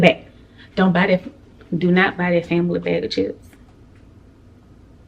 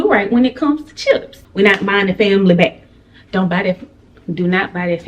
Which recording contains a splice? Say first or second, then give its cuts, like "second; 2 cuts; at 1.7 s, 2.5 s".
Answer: second; 1 cut; at 1.4 s